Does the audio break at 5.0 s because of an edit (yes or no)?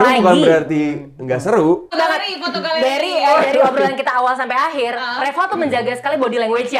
no